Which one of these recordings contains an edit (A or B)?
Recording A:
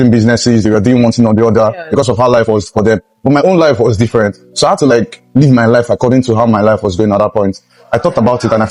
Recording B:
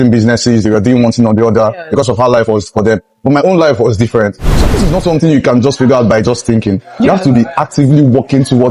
B